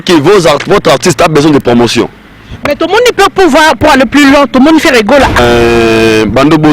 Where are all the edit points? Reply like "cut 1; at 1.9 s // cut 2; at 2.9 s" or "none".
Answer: cut 1; at 5.4 s